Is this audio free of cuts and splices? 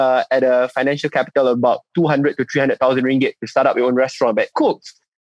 yes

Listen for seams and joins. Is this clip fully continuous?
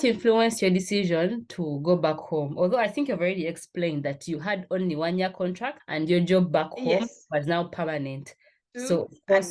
yes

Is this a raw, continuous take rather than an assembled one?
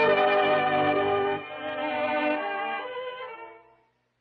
yes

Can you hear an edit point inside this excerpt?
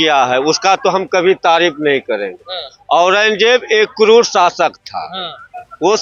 no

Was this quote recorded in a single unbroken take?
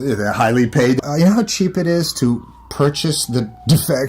no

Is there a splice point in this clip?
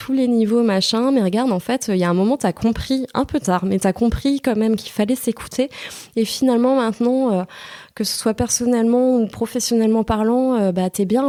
no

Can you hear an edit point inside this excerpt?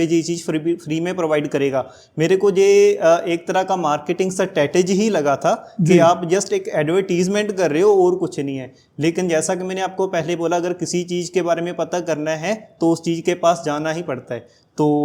no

